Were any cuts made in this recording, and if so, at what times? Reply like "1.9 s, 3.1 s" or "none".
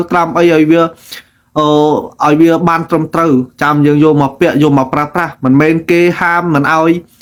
none